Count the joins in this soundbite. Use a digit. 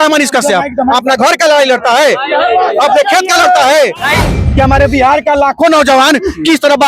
1